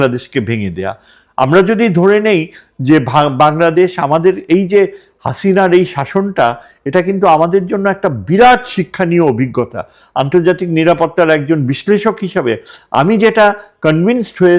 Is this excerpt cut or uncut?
uncut